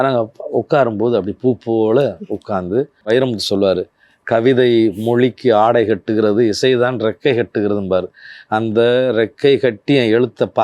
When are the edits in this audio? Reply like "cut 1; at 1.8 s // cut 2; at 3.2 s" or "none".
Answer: cut 1; at 3.0 s